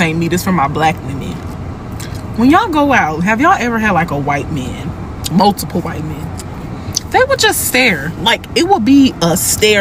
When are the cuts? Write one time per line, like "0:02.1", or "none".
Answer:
none